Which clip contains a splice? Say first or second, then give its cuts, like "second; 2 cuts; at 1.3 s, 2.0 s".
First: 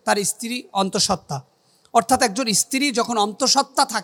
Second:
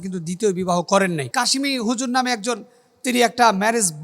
second; 1 cut; at 1.2 s